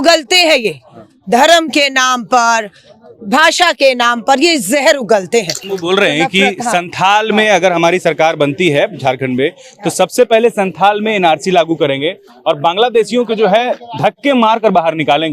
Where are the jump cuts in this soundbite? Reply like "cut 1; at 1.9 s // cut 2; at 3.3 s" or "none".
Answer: cut 1; at 5.6 s

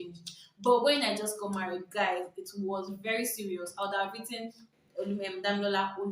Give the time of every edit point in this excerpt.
none

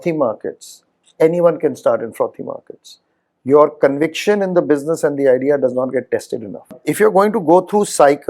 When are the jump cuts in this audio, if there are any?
cut 1; at 6.8 s

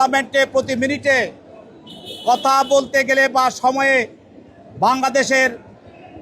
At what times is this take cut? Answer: none

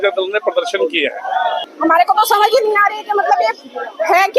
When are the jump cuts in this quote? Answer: cut 1; at 1.7 s

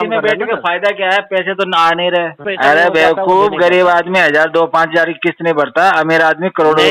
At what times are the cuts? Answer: cut 1; at 2.5 s

